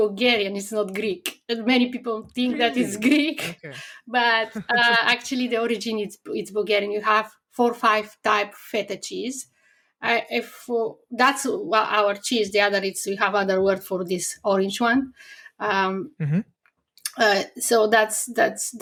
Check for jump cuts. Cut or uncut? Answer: uncut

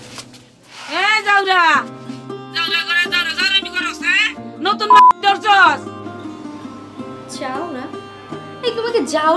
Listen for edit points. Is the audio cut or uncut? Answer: uncut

